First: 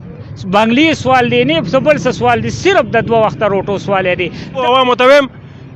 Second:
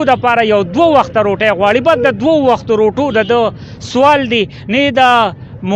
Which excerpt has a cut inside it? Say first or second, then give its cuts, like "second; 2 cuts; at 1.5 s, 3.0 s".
first; 1 cut; at 4.5 s